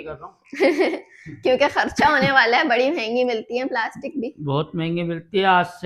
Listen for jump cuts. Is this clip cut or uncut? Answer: uncut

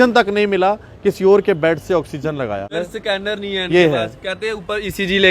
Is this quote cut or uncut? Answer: cut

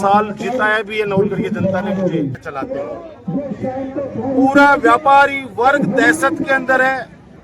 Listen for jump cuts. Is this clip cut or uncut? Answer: cut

